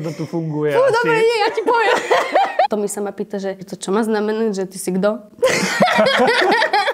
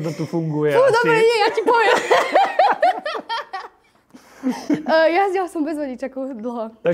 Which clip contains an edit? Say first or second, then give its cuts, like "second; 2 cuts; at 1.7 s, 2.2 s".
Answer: first; 2 cuts; at 2.7 s, 3.7 s